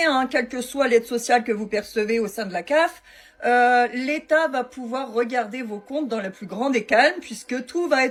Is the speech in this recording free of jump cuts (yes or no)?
yes